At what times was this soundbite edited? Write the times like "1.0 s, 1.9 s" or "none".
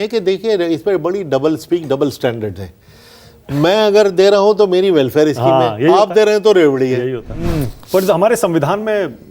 7.4 s